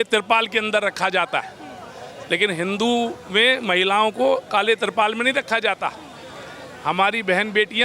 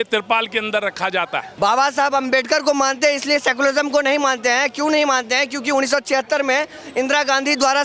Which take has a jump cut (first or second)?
second